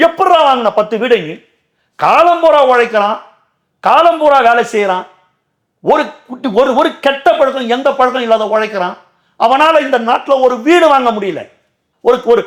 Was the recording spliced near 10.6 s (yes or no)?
no